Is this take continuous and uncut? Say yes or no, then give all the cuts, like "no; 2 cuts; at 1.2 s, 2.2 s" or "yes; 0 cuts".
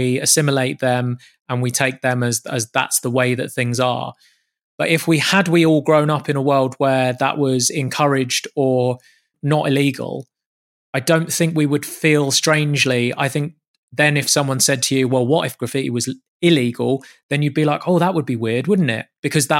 no; 1 cut; at 9.3 s